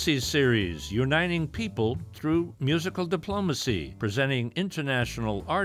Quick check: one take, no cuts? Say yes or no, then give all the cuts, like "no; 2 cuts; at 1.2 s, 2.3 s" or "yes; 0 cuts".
no; 1 cut; at 3.9 s